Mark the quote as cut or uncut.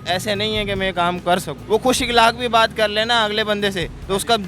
cut